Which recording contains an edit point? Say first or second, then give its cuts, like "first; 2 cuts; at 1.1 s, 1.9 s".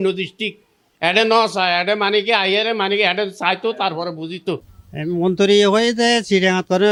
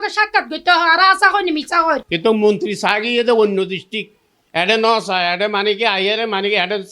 second; 1 cut; at 2.1 s